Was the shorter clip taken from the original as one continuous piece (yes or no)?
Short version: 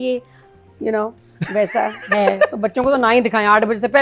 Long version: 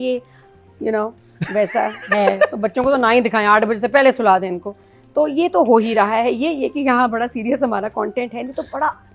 yes